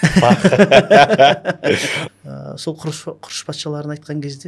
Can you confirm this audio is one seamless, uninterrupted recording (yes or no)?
no